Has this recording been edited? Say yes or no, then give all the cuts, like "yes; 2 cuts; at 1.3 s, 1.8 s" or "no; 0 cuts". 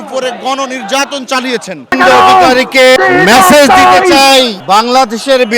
yes; 3 cuts; at 1.9 s, 3.0 s, 4.6 s